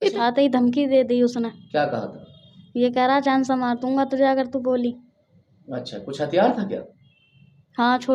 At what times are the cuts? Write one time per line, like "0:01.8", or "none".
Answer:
none